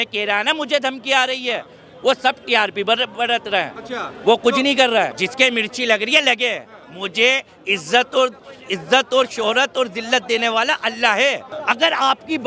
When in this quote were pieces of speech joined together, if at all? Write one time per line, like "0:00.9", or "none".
0:05.1
0:11.5